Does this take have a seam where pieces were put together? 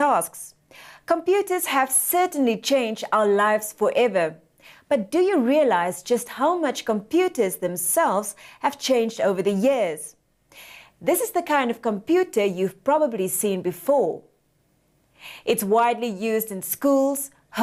no; 0 cuts

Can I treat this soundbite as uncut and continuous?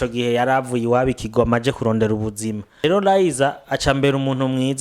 no; 1 cut; at 2.8 s

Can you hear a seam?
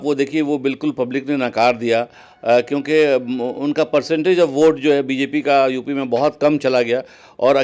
no; 0 cuts

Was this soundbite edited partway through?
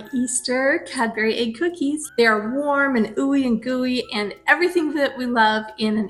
no; 0 cuts

